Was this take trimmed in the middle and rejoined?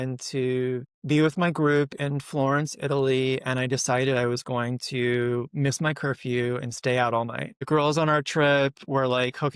yes; 2 cuts; at 0.9 s, 7.5 s

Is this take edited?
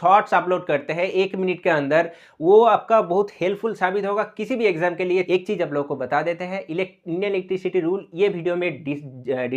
yes; 1 cut; at 5.3 s

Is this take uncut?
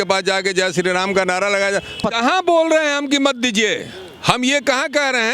no; 1 cut; at 2.0 s

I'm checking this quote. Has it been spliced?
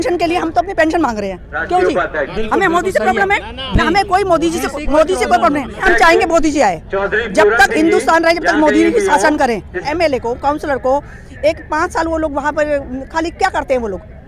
yes; 2 cuts; at 5.8 s, 9.8 s

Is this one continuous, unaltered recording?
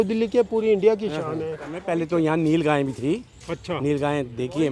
no; 1 cut; at 1.8 s

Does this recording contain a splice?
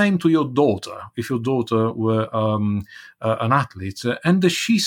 no; 0 cuts

